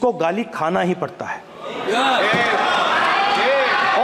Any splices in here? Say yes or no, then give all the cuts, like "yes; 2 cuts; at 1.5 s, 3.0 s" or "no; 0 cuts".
no; 0 cuts